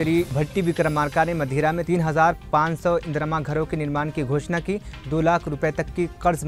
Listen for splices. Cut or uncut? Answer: uncut